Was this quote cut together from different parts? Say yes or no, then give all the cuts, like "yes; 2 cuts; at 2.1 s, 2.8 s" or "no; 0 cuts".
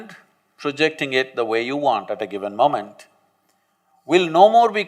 no; 0 cuts